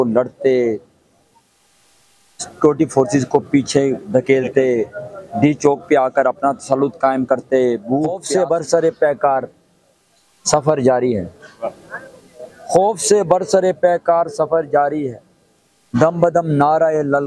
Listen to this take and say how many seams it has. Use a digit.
1